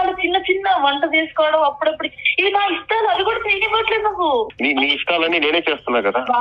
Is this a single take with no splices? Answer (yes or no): no